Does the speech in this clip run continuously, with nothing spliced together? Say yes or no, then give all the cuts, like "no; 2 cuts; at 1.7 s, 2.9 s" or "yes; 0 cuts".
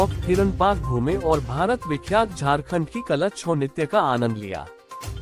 yes; 0 cuts